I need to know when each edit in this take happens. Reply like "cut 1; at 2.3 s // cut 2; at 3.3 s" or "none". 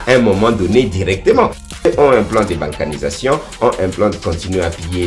cut 1; at 1.7 s